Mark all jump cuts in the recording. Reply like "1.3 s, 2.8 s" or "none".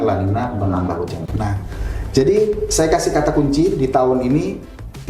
1.2 s